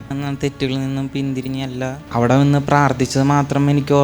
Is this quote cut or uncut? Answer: cut